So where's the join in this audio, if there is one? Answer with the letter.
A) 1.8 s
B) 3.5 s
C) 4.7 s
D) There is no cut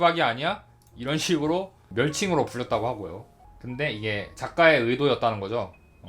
A